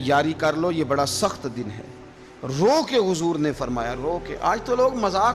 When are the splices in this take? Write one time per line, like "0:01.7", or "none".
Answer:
none